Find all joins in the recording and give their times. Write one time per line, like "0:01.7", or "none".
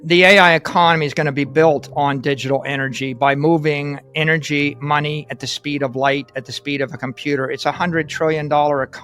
none